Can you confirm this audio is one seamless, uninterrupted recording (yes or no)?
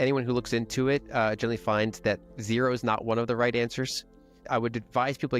no